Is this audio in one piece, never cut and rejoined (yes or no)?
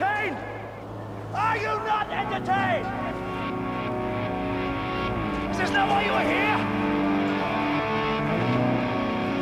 yes